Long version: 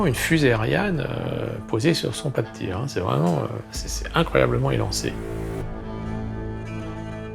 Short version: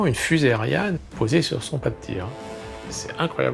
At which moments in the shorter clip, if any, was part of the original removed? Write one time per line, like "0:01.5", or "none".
0:01.1
0:02.4